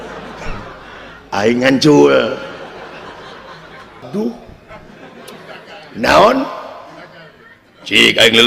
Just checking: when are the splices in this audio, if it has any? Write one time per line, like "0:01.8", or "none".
0:04.1